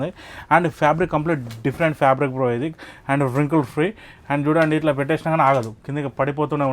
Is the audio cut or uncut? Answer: uncut